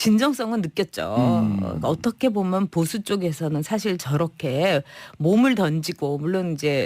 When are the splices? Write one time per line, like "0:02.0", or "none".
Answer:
0:05.9

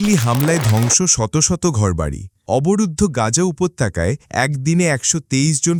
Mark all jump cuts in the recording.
none

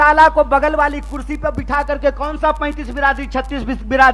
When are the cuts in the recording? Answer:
none

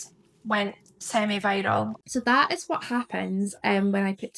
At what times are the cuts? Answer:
0:02.0

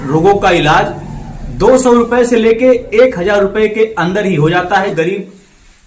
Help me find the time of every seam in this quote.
0:04.9

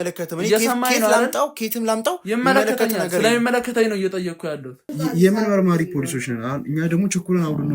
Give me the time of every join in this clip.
0:04.9

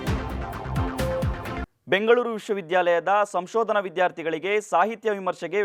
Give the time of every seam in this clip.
0:01.7

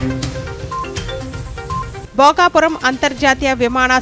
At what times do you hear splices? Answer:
0:01.8

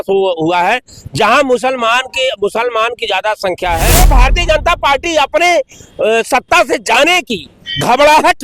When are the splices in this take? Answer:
0:04.1

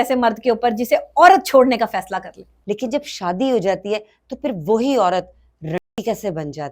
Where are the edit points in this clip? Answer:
0:02.5

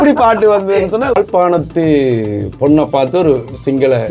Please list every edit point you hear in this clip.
0:01.2

